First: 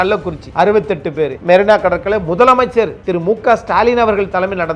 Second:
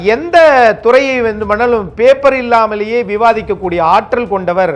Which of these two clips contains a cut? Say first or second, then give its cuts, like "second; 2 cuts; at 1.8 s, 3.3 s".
first; 1 cut; at 1.4 s